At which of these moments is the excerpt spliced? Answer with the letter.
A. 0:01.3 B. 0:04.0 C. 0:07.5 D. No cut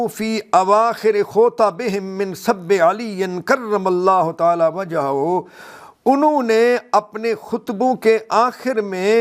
A